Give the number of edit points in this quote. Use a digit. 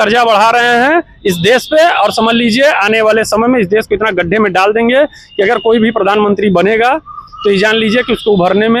0